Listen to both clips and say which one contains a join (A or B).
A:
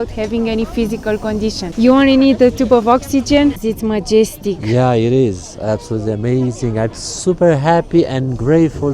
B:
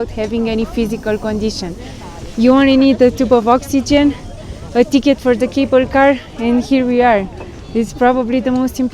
A